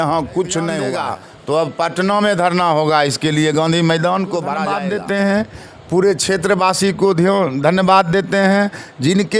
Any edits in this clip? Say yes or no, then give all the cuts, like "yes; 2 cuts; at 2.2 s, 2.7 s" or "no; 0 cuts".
yes; 2 cuts; at 0.9 s, 4.8 s